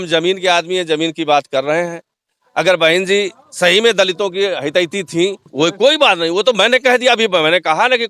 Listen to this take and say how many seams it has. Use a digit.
1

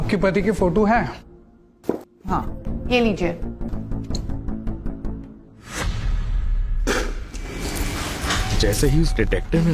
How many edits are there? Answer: 2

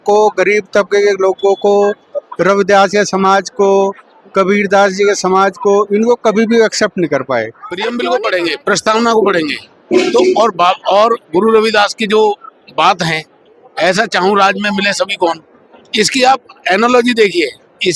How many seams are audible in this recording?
1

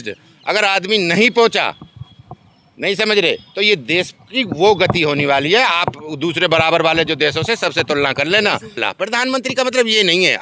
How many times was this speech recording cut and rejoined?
1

